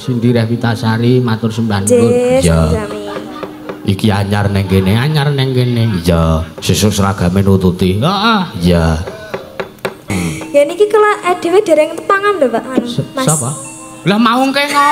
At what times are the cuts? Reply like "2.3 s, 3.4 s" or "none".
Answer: 10.1 s